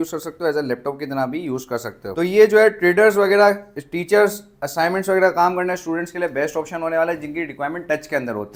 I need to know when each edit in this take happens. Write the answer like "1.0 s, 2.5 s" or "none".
none